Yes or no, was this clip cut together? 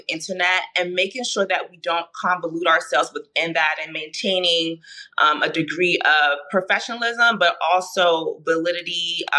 no